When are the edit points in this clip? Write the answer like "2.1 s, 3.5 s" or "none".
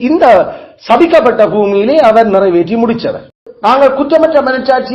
3.5 s